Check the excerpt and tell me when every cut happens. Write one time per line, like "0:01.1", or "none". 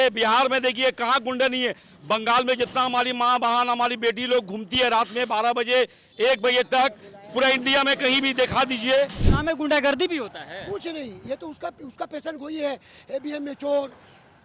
0:09.2